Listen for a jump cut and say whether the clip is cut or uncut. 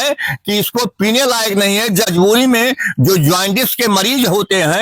cut